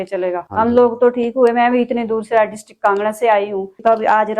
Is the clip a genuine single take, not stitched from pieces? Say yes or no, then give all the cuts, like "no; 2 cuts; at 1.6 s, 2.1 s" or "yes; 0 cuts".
yes; 0 cuts